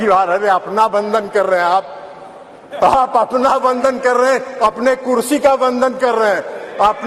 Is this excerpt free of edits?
yes; 0 cuts

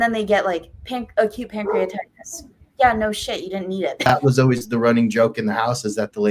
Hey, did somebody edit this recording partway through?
yes; 1 cut; at 4.0 s

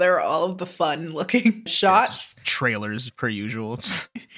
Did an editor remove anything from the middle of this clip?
yes; 1 cut; at 1.7 s

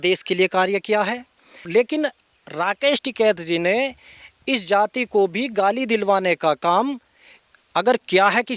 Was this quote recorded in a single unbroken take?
no; 1 cut; at 1.6 s

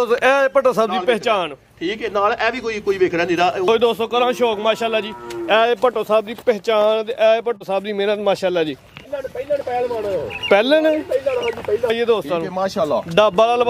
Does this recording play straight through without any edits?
no; 3 cuts; at 3.7 s, 9.0 s, 11.9 s

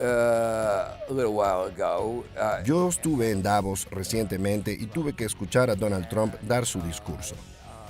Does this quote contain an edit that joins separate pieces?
yes; 1 cut; at 2.6 s

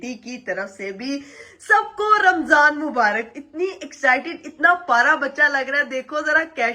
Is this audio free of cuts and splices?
yes; 0 cuts

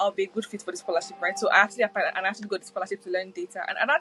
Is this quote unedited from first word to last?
yes; 0 cuts

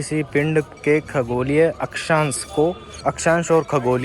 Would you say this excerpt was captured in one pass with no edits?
no; 1 cut; at 2.9 s

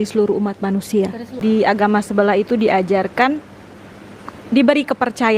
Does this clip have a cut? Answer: yes; 1 cut; at 1.2 s

